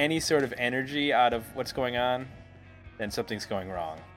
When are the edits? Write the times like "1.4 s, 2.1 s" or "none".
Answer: none

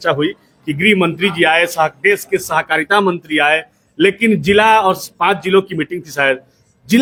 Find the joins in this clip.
none

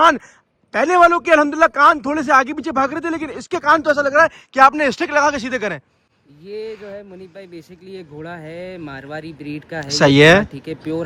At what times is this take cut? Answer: none

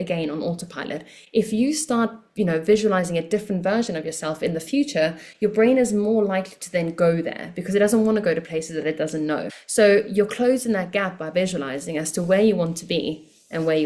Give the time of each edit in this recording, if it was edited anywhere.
9.5 s

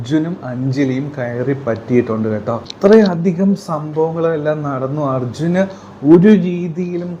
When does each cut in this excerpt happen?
2.7 s

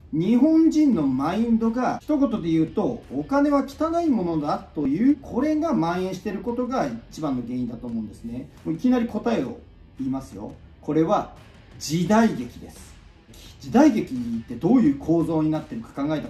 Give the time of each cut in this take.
2.0 s, 4.8 s, 8.5 s, 10.6 s, 13.3 s

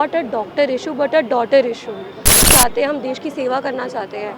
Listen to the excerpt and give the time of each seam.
2.5 s

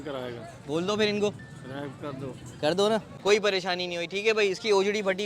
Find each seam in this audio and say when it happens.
3.1 s

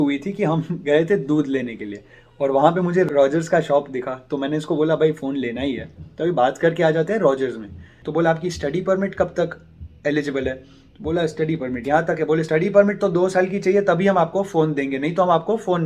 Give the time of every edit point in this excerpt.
3.1 s, 8.0 s, 12.5 s

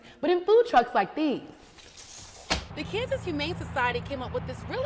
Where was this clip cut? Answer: 2.7 s

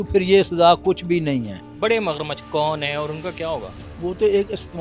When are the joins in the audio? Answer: 1.6 s, 3.8 s

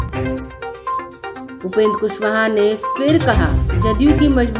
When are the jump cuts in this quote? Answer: 1.0 s

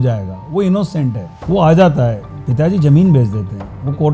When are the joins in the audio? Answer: 1.3 s

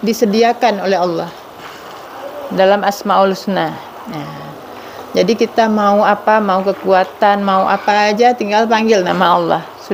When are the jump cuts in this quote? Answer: none

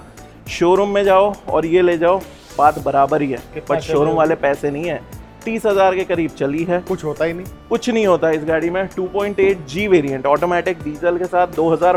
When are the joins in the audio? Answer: none

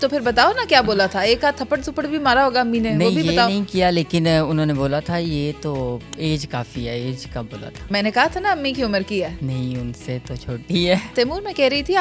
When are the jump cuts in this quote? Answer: 9.4 s, 11.1 s

